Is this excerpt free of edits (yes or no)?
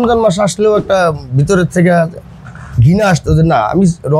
yes